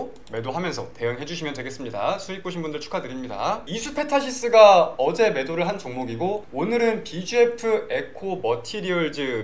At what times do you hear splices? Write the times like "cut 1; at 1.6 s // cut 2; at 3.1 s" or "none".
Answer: cut 1; at 3.6 s